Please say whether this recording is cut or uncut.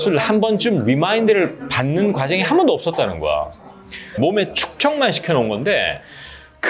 cut